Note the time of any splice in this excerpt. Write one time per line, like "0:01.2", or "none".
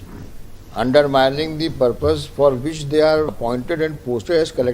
0:03.3

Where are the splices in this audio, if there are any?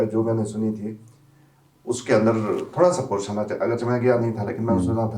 none

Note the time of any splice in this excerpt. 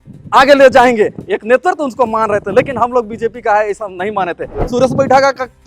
0:04.6

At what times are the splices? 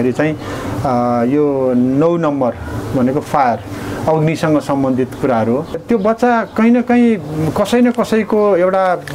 0:05.8

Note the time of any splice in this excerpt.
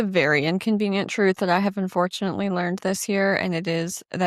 none

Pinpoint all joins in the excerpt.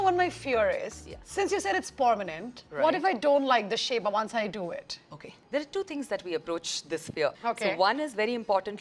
none

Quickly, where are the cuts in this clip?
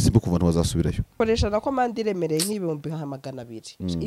0:01.1

